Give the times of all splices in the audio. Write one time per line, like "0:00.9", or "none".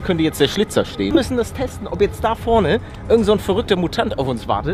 0:01.1